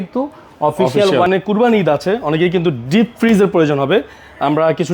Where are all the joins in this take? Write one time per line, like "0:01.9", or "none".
0:01.3